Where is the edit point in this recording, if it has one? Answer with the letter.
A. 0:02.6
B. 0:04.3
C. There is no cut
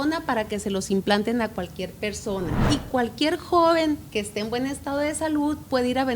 A